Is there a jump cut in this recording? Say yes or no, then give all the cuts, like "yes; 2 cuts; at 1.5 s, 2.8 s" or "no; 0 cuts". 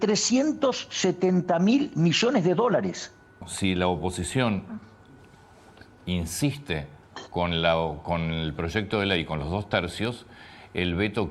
yes; 1 cut; at 3.5 s